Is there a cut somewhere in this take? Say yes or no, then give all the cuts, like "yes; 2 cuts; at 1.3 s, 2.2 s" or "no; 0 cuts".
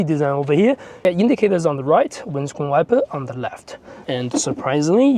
yes; 2 cuts; at 1.1 s, 3.9 s